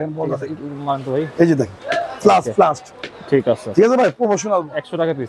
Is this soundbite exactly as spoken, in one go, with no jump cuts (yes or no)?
yes